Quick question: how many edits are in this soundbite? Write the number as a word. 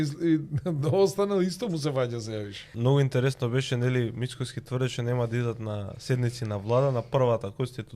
one